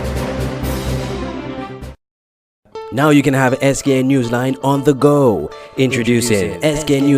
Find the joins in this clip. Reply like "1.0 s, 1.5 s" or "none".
2.6 s